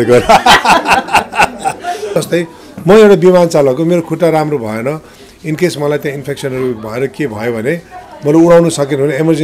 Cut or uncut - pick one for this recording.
cut